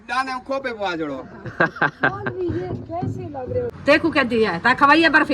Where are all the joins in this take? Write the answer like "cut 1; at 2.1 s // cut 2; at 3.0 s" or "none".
cut 1; at 3.7 s